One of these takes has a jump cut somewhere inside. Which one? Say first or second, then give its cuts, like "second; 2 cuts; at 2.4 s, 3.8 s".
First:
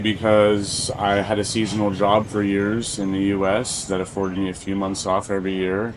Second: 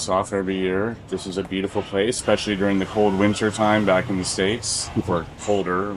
second; 1 cut; at 2.2 s